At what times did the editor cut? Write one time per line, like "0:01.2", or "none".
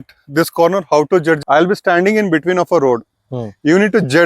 0:01.4

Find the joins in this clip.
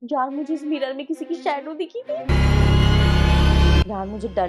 none

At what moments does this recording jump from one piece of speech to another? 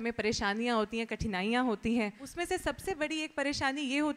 0:02.3

